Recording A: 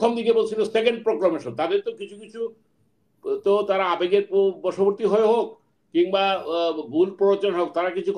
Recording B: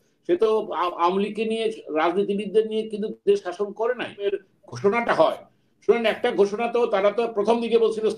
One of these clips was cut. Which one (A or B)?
B